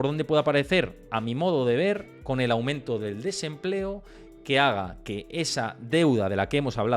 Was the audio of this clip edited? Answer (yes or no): no